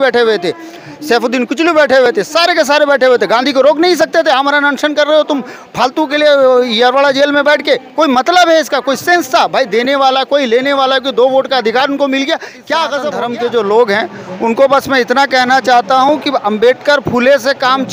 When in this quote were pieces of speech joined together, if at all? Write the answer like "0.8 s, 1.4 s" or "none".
13.1 s